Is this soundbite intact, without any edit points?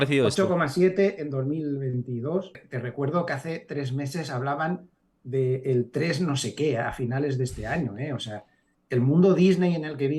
no; 1 cut; at 2.6 s

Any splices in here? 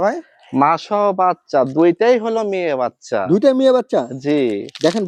no; 0 cuts

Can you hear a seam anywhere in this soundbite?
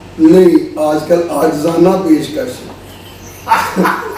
no; 0 cuts

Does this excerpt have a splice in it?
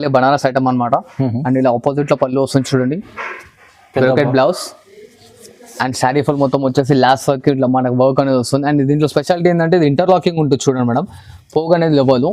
no; 0 cuts

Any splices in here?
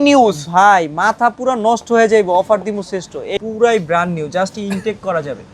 yes; 1 cut; at 3.3 s

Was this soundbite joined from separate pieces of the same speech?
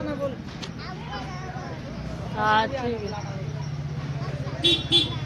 no; 0 cuts

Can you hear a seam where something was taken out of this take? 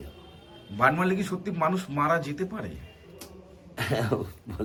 no; 0 cuts

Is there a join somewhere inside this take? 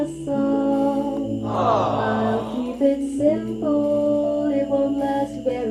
no; 0 cuts

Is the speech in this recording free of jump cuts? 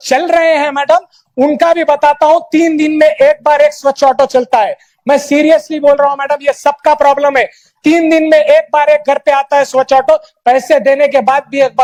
yes; 0 cuts

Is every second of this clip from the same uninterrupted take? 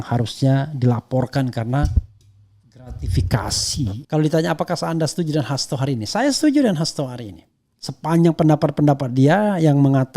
no; 1 cut; at 4.0 s

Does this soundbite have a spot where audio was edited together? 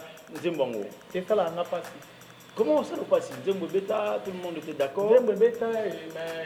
no; 0 cuts

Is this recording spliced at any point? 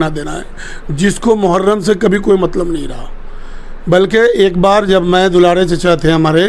no; 0 cuts

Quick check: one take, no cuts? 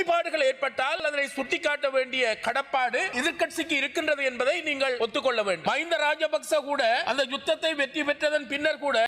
no; 4 cuts; at 1.0 s, 3.1 s, 5.6 s, 7.0 s

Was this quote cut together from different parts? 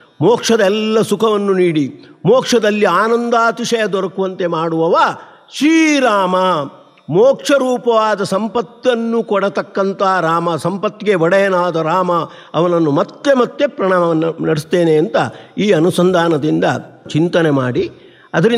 yes; 1 cut; at 17.1 s

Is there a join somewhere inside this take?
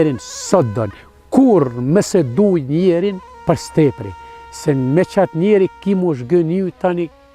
yes; 1 cut; at 3.3 s

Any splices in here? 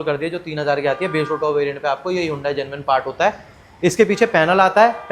no; 0 cuts

